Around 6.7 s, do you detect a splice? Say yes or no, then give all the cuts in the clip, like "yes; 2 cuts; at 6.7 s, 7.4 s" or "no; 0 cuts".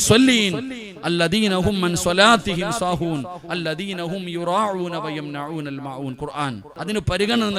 yes; 1 cut; at 6.7 s